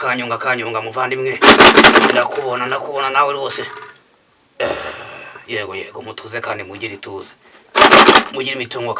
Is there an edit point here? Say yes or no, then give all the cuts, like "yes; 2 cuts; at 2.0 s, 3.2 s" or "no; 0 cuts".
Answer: no; 0 cuts